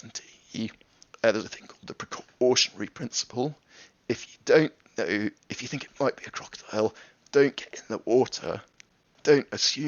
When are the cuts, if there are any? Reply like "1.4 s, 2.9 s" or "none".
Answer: none